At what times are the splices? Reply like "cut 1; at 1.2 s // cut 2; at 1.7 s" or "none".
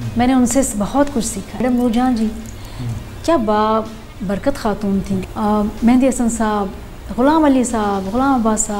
cut 1; at 1.6 s // cut 2; at 5.2 s